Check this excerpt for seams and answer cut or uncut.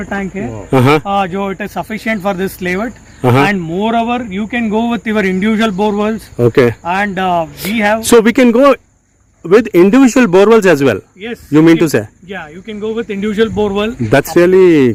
uncut